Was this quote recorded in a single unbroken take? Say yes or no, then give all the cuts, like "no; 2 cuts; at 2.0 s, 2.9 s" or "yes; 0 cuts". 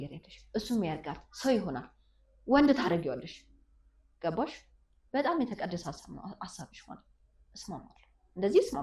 yes; 0 cuts